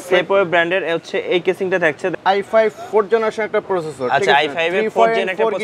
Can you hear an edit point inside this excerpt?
yes; 1 cut; at 2.1 s

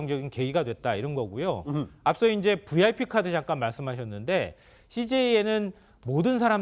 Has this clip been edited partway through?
yes; 1 cut; at 1.3 s

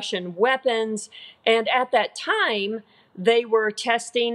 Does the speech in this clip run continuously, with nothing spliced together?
yes; 0 cuts

